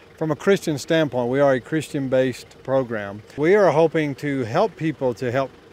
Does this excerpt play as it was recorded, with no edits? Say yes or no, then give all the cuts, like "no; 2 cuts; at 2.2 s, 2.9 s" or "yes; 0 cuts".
no; 1 cut; at 3.2 s